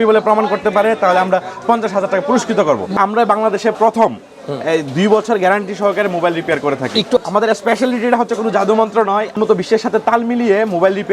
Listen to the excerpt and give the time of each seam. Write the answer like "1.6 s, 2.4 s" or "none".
2.9 s, 7.2 s, 9.3 s